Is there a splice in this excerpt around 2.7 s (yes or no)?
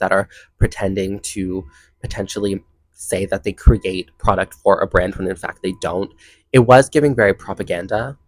no